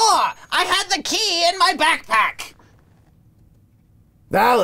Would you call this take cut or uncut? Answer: uncut